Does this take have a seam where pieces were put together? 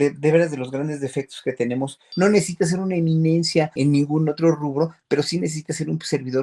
yes; 2 cuts; at 2.0 s, 3.7 s

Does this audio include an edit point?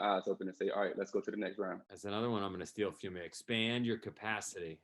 yes; 1 cut; at 1.9 s

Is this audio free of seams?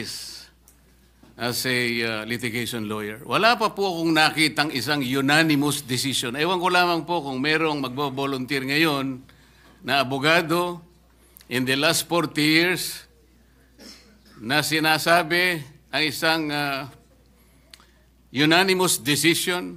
yes; 0 cuts

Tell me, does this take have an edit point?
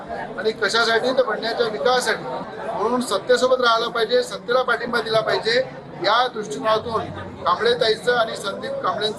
no; 0 cuts

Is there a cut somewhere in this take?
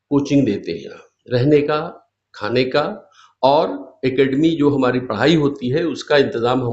no; 0 cuts

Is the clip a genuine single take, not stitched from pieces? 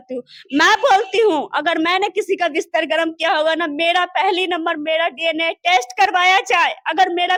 yes; 0 cuts

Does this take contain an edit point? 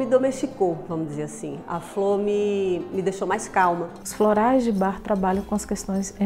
yes; 1 cut; at 4.0 s

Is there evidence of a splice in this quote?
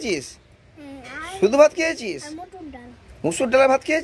no; 0 cuts

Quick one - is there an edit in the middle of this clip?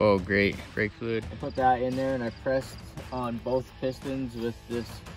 yes; 1 cut; at 1.3 s

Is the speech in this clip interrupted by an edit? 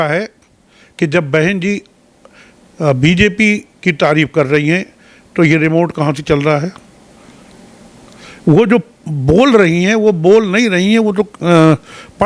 no; 0 cuts

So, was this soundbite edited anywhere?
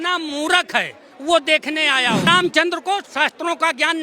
yes; 1 cut; at 2.3 s

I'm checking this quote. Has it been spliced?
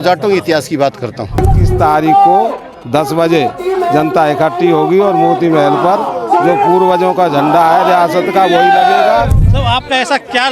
yes; 2 cuts; at 1.6 s, 9.4 s

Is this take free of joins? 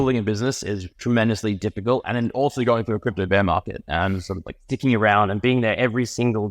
no; 2 cuts; at 0.9 s, 2.1 s

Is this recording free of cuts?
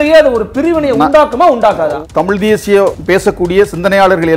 no; 2 cuts; at 2.0 s, 3.0 s

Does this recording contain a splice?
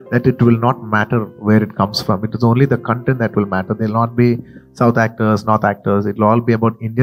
no; 0 cuts

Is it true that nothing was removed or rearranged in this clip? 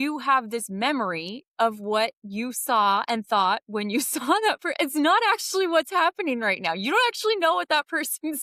yes; 0 cuts

